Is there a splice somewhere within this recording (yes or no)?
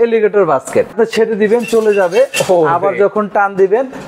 yes